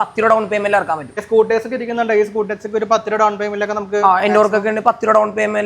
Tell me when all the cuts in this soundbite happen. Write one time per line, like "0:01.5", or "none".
0:01.1

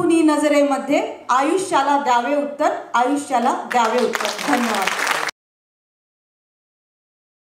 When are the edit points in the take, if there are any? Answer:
none

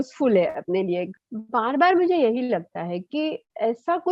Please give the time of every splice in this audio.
0:01.1

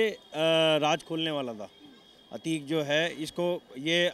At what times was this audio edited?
none

